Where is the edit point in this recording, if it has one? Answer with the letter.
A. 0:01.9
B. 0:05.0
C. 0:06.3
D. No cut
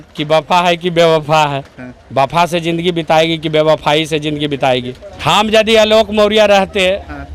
B